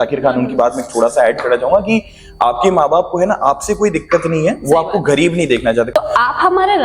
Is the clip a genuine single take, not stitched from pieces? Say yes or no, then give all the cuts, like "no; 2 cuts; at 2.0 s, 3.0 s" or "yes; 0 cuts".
no; 1 cut; at 5.9 s